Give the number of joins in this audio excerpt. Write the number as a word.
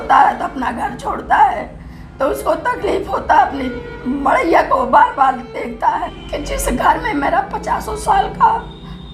one